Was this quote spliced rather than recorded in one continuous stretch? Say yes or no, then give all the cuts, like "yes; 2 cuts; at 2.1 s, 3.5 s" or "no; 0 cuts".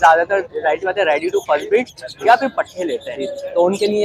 no; 0 cuts